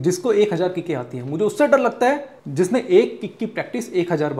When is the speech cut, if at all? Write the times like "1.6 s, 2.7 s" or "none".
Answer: 2.4 s

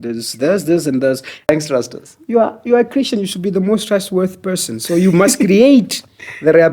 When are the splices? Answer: 1.5 s

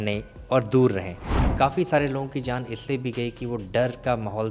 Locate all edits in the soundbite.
1.4 s

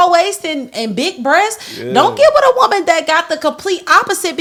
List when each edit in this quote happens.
none

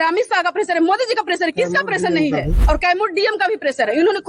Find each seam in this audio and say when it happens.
2.5 s

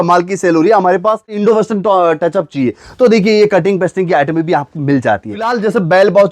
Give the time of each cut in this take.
1.4 s, 5.5 s

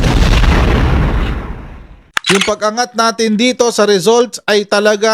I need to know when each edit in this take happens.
2.0 s

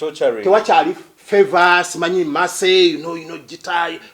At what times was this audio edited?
1.1 s

